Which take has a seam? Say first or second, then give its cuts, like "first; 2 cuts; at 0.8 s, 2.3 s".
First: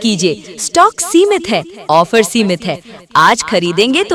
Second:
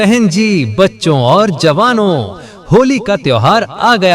second; 1 cut; at 2.2 s